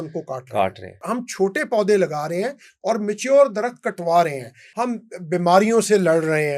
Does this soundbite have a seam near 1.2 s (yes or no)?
yes